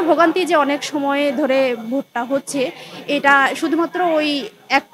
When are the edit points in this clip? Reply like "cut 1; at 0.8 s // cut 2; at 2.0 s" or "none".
none

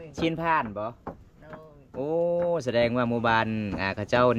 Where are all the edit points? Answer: none

